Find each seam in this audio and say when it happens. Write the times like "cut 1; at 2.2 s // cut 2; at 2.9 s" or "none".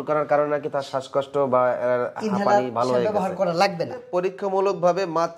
cut 1; at 4.1 s